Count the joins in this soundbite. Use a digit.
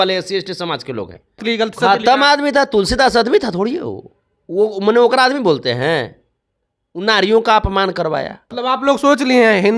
2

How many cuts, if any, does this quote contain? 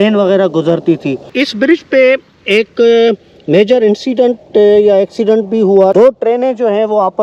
2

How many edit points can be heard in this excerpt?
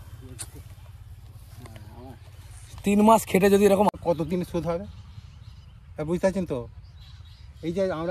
1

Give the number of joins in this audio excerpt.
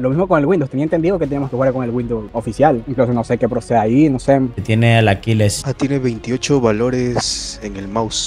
2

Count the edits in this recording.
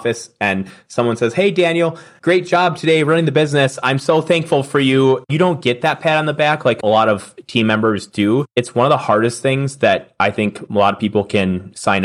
4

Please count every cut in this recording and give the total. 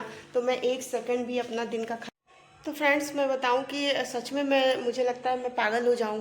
1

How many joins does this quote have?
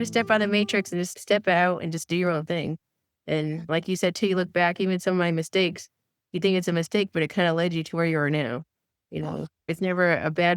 1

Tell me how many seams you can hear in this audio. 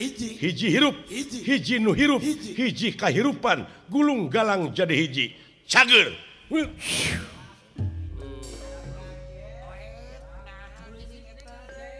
0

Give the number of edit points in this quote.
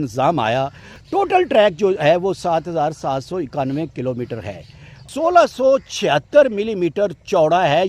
2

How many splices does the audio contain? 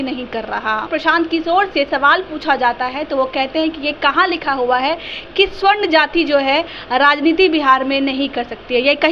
1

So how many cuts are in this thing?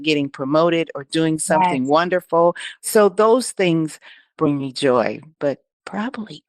1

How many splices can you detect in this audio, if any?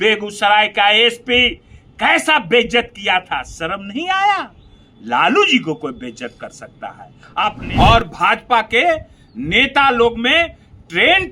1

